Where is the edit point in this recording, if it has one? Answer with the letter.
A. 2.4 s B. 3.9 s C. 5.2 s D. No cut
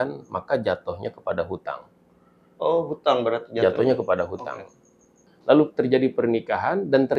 C